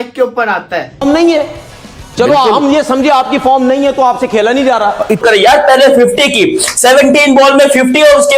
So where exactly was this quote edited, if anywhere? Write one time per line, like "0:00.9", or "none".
0:01.0
0:05.2

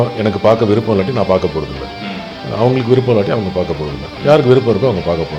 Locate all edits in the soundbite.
none

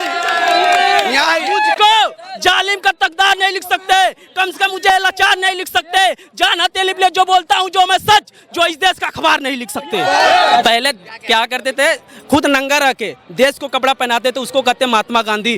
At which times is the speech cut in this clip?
0:10.6

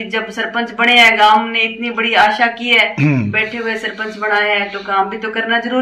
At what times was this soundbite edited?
none

